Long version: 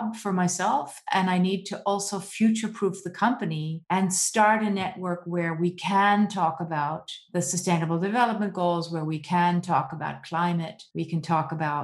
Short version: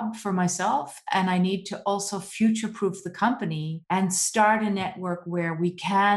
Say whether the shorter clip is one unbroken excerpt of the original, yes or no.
yes